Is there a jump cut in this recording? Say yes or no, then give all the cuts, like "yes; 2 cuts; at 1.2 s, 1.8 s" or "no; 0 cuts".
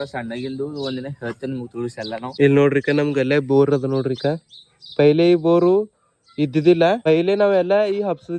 yes; 2 cuts; at 2.3 s, 7.0 s